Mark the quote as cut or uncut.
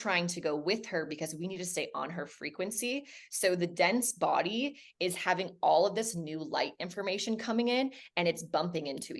uncut